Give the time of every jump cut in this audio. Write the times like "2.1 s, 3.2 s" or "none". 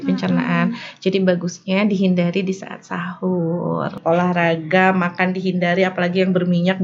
4.0 s